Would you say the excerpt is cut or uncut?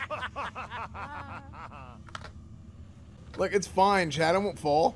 uncut